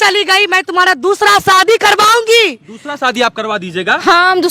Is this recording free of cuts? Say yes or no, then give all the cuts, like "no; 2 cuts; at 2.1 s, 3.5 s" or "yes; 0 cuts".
yes; 0 cuts